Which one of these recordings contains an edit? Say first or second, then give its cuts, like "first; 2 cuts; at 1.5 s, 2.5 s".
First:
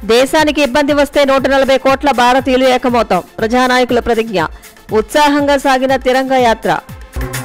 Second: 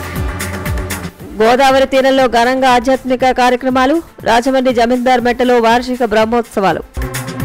second; 1 cut; at 1.0 s